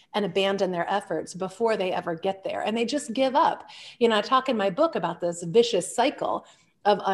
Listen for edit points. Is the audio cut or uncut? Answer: uncut